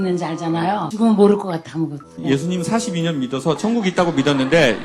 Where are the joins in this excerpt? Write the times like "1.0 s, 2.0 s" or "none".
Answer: 0.9 s, 2.1 s